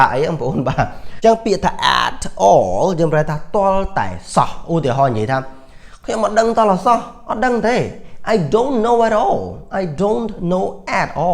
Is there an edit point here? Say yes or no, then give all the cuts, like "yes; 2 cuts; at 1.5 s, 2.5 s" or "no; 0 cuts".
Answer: yes; 1 cut; at 1.0 s